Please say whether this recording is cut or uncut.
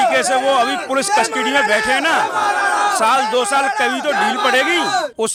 uncut